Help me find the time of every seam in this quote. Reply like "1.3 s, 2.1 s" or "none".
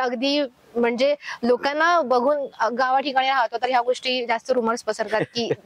none